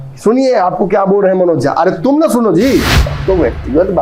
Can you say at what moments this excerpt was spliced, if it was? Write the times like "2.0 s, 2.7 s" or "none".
3.0 s

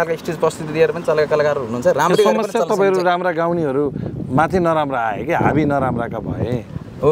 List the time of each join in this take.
none

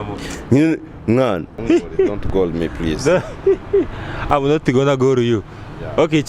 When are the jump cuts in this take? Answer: 1.5 s

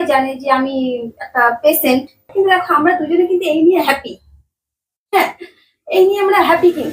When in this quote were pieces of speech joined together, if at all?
2.3 s

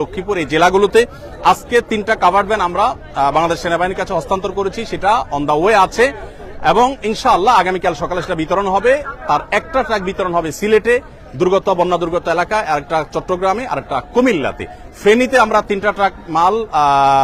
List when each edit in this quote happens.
none

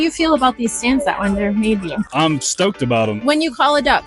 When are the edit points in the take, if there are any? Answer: none

